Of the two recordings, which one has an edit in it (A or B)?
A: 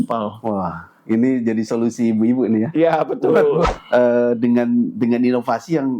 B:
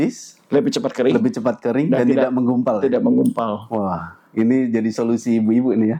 A